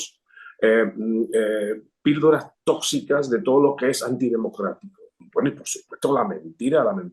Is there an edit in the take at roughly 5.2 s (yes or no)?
yes